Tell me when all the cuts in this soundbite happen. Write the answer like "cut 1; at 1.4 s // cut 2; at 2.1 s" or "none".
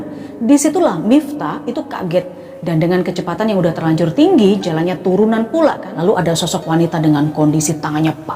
cut 1; at 5.9 s